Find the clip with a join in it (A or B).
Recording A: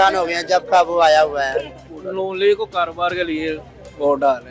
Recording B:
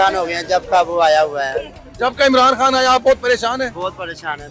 A